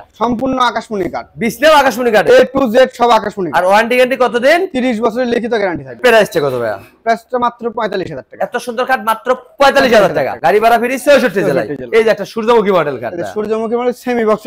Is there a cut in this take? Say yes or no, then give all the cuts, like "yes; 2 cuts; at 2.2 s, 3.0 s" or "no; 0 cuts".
no; 0 cuts